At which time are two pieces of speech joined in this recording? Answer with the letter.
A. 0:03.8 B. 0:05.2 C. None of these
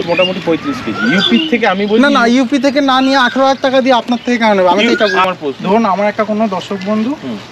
B